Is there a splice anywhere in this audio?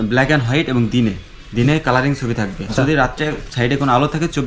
yes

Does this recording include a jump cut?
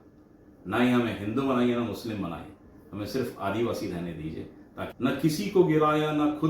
yes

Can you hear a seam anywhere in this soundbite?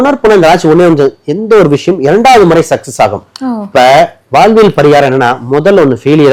no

